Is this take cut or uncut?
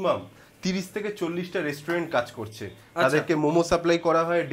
uncut